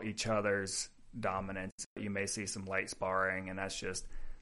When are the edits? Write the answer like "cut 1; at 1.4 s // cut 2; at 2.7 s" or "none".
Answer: cut 1; at 2.0 s